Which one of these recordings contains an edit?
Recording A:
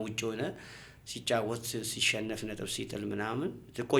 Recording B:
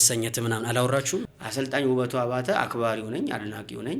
B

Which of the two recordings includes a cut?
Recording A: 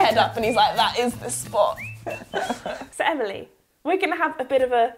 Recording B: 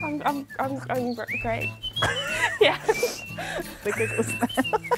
A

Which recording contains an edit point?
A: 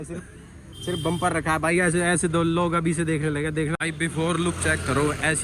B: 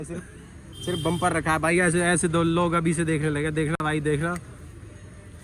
A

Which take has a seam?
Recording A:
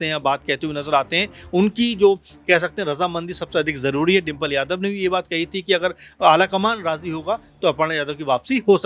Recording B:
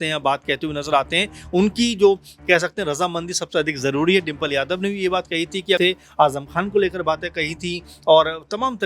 B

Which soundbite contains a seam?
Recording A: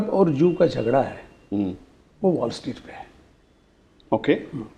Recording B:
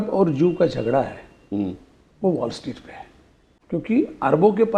B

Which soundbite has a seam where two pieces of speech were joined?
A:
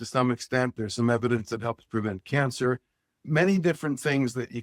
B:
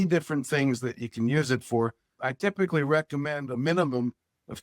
B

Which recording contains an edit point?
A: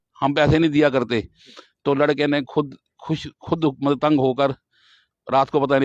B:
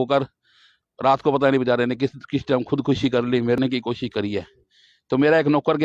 B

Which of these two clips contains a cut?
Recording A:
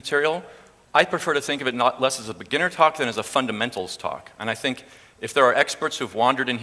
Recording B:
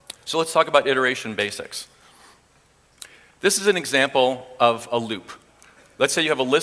A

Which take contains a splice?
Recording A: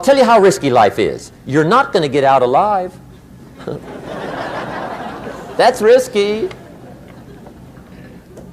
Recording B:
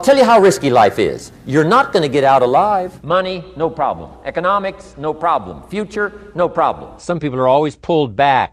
B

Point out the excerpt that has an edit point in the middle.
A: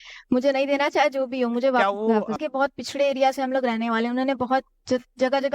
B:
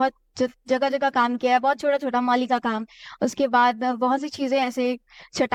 A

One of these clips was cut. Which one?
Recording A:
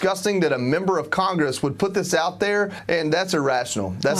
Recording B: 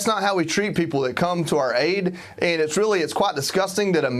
A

